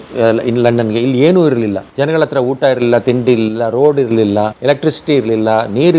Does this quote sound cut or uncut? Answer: cut